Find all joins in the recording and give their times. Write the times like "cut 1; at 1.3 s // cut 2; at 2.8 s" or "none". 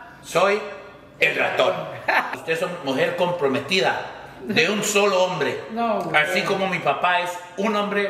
cut 1; at 2.4 s